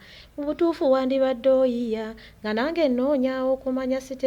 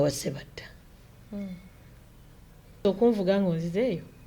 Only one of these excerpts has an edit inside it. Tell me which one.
second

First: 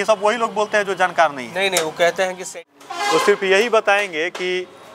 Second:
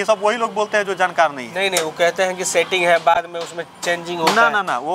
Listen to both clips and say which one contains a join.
first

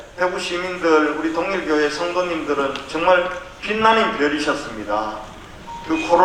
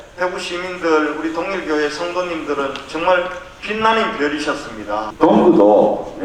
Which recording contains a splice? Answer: second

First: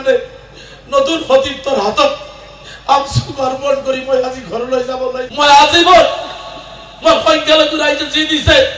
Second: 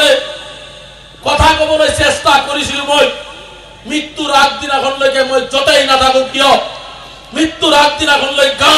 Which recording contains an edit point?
first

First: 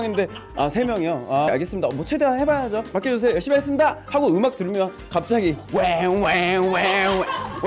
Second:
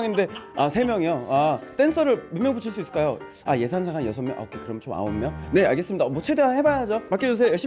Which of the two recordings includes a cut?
first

